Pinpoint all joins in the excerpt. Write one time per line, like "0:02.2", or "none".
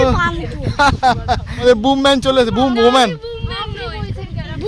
0:01.6

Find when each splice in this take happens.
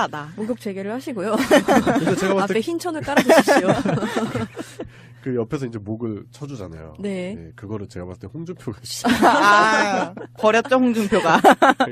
0:02.0

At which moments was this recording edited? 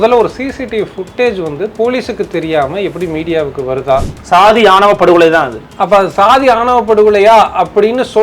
0:04.2

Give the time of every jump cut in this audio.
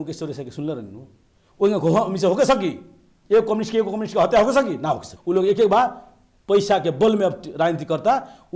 0:05.1

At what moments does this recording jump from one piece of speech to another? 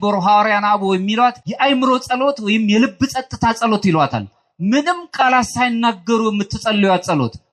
0:01.5

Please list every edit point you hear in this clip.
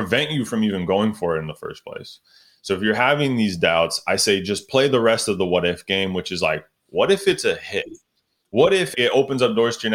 0:08.9

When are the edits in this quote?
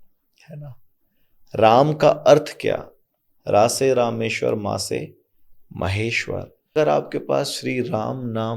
0:06.7

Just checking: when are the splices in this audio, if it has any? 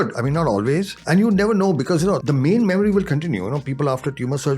0:01.0
0:02.2

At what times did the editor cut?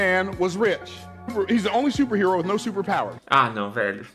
0:03.2

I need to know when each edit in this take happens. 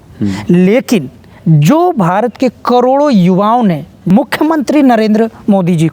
0:04.1

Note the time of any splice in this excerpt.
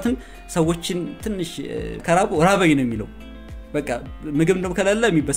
0:02.0

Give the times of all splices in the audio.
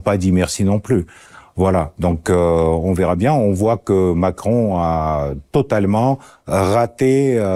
none

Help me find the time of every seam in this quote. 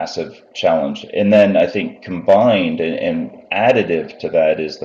none

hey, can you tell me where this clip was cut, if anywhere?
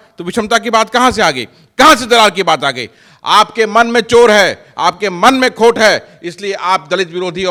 none

